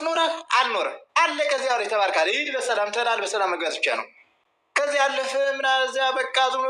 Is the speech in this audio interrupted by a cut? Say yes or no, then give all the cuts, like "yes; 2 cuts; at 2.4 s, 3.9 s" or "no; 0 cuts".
no; 0 cuts